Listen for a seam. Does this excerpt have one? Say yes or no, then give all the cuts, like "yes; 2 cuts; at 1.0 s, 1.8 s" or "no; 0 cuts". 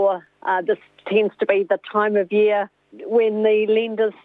no; 0 cuts